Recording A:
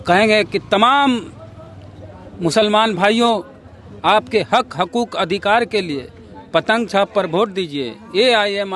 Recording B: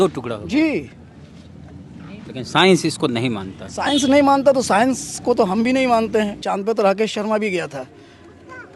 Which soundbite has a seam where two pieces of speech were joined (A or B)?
B